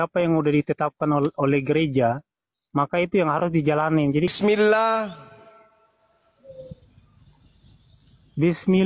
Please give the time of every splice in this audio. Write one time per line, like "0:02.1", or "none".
0:04.3